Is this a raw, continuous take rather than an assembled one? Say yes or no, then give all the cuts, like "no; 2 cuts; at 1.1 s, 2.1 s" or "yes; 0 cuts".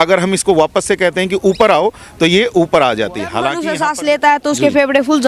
no; 1 cut; at 3.4 s